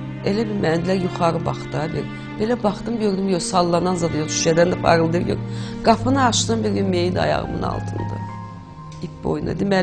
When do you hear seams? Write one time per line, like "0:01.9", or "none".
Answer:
none